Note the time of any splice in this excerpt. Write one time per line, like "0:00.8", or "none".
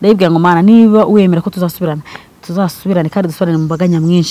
none